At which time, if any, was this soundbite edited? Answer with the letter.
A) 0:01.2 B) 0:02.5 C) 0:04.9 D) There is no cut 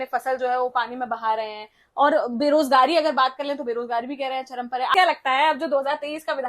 C